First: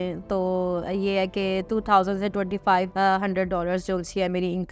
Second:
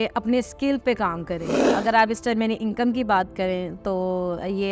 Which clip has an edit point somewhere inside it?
second; 1 cut; at 1.6 s

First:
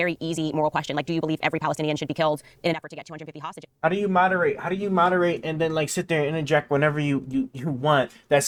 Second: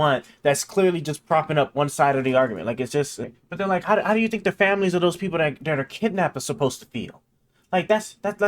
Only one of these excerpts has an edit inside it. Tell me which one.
second; 1 cut; at 3.2 s

